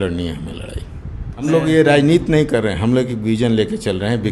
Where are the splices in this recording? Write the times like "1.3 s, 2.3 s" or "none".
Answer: 1.4 s